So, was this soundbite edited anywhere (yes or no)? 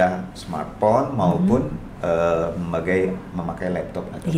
no